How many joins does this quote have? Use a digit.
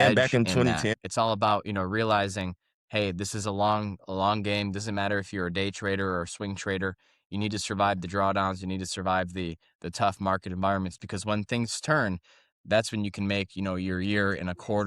1